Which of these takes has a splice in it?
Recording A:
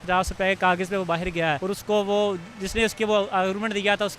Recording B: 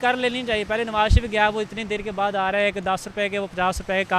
A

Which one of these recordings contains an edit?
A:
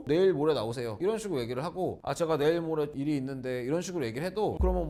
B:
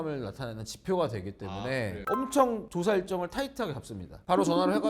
B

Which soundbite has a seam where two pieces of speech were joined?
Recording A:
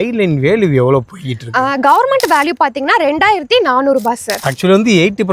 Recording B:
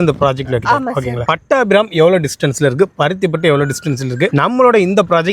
A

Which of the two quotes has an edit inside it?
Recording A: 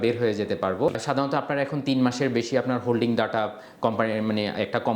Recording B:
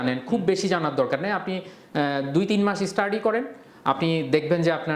A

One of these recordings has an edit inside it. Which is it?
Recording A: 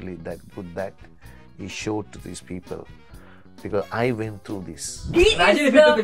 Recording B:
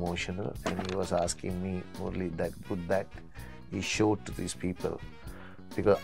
A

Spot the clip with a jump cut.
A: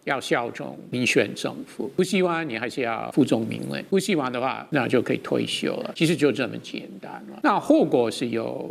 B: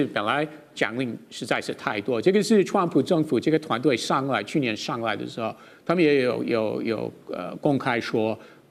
A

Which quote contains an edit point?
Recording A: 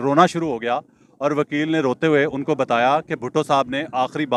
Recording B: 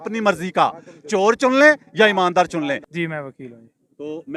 B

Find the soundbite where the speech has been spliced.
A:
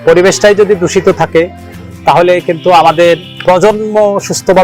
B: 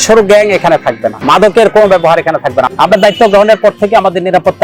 B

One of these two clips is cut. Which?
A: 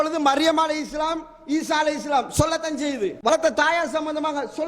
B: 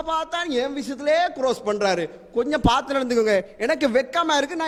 A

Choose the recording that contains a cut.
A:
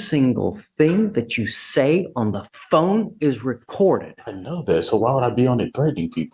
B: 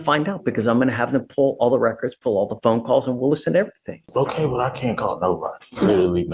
B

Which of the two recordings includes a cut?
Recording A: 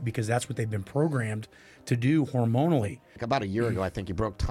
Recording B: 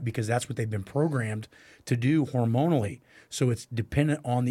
A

